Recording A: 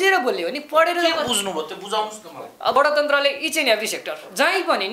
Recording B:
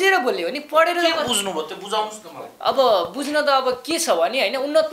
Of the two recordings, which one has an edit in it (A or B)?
A